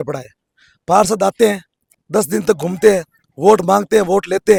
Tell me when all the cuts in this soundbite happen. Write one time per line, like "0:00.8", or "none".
none